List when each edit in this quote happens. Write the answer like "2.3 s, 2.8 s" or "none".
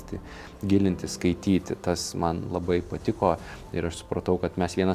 none